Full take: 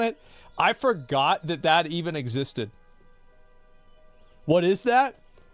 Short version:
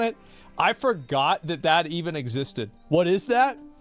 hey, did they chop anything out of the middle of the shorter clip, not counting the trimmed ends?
yes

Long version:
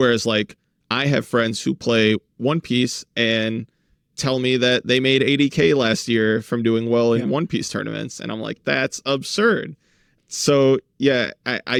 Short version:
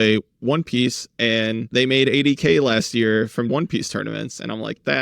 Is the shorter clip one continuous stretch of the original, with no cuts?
no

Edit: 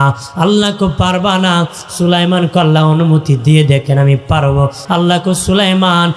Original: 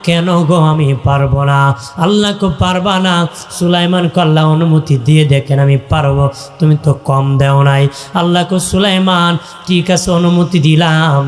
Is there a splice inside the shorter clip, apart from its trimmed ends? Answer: yes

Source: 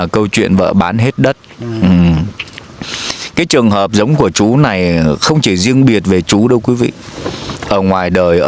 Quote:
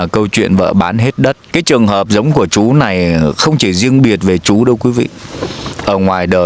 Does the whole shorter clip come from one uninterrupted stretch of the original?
no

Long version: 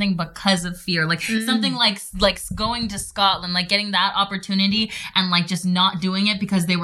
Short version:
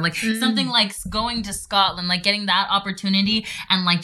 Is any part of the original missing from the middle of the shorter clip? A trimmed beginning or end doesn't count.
yes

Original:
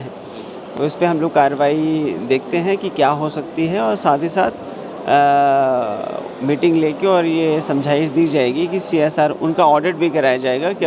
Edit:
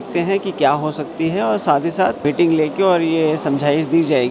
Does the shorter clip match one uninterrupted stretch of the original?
no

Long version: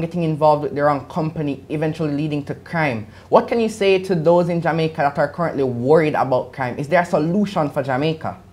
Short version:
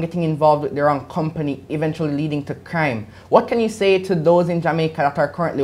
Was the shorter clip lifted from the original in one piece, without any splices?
yes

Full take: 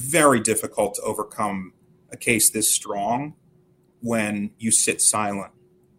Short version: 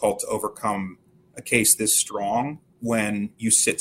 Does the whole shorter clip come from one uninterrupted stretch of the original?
no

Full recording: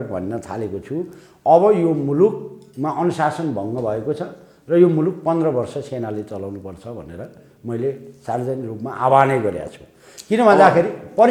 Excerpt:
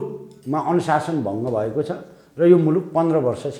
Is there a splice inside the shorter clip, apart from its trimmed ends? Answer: no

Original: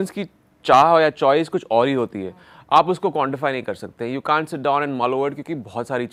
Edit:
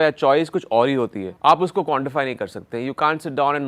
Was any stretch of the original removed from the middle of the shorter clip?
yes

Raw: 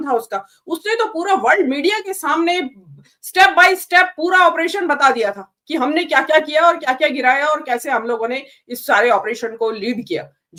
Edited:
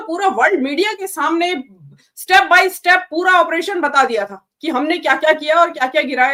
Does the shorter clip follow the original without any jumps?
yes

